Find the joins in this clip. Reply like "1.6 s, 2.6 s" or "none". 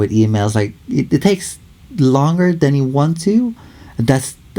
none